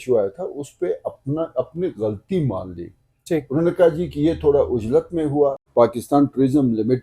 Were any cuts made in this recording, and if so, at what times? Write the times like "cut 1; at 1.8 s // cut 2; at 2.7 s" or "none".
cut 1; at 5.7 s